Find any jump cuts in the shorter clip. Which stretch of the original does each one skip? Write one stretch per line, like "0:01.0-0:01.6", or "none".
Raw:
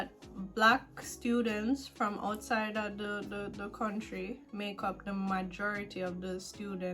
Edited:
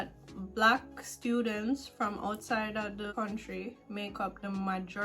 0:03.1-0:03.7